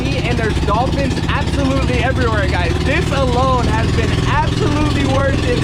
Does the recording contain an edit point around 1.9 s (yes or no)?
no